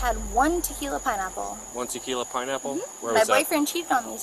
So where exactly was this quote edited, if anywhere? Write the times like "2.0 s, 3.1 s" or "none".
none